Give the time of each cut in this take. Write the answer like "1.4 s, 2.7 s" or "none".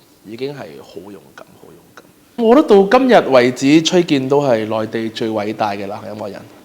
2.4 s